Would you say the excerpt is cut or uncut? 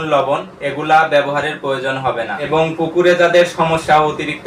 cut